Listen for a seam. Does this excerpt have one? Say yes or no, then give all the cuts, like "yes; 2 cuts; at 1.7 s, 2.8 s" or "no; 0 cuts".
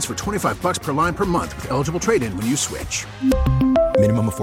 no; 0 cuts